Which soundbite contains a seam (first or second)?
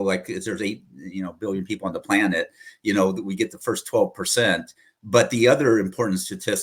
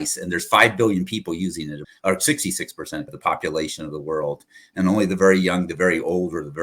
second